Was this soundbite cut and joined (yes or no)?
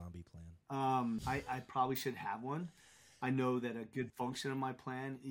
yes